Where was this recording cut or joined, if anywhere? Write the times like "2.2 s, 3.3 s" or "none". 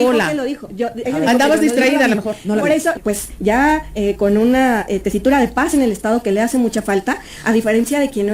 3.0 s